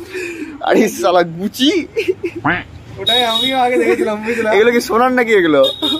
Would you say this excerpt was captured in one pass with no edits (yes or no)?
yes